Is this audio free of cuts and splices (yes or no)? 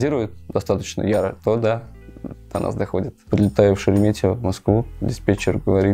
no